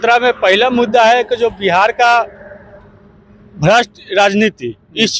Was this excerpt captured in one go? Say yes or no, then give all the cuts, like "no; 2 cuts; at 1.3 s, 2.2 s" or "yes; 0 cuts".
yes; 0 cuts